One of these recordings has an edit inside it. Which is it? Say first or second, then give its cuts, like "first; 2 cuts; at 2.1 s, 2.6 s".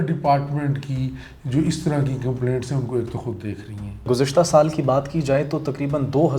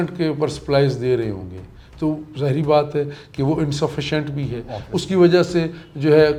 first; 1 cut; at 4.1 s